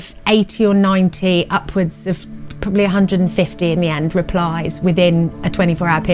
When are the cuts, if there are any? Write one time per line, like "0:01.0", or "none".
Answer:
none